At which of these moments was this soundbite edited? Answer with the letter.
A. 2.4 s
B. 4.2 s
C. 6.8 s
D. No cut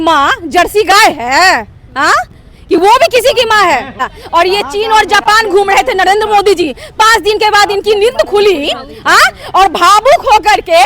B